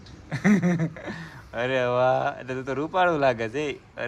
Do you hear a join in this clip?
no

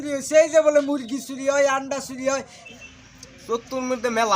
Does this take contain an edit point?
yes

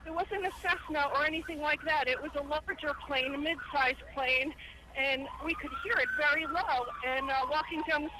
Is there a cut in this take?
yes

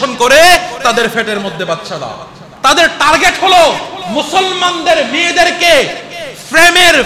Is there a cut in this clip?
yes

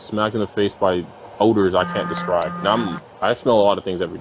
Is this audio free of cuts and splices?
yes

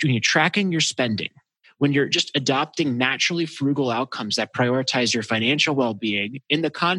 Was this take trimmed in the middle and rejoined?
yes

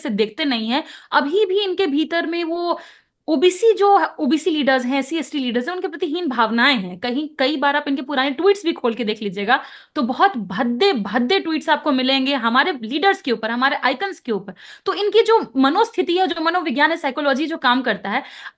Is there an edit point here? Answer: no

